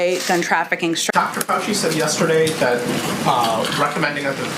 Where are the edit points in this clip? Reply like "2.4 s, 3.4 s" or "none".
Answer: 1.1 s

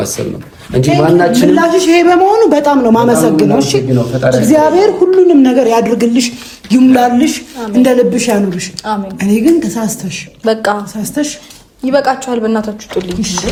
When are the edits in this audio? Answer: none

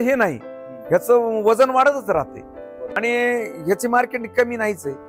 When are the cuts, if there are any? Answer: 3.0 s

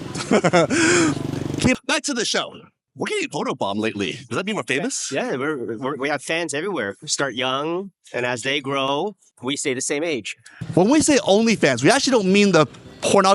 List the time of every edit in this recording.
none

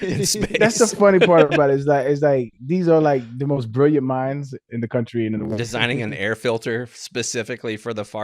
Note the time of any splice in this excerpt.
5.6 s

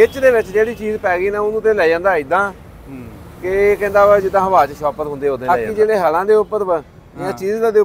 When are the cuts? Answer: 5.5 s

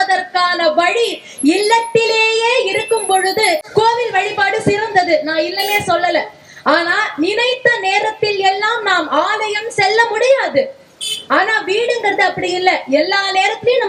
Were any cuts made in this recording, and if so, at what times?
3.6 s

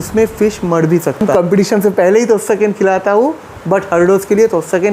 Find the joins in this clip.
1.3 s

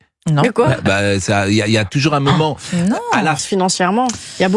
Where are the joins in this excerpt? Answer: 3.4 s

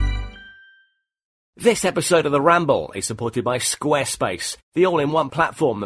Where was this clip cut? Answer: 1.6 s

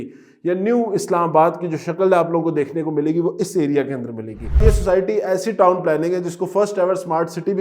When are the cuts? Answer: 4.6 s

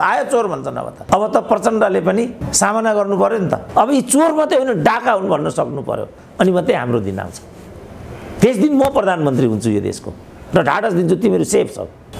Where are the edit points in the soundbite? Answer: 1.0 s, 3.6 s

